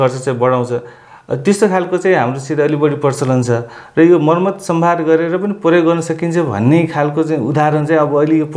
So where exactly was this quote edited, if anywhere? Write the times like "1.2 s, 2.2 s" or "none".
none